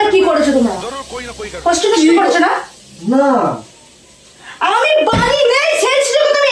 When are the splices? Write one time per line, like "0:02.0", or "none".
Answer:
none